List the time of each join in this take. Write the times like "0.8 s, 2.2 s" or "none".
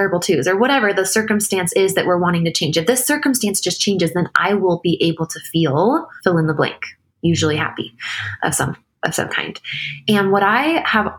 6.1 s